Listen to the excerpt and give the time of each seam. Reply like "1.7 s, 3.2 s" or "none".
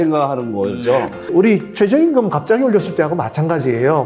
1.3 s